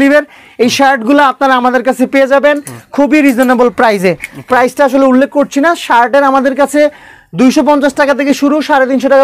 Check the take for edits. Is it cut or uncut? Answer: uncut